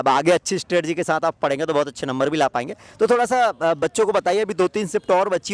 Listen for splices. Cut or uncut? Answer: uncut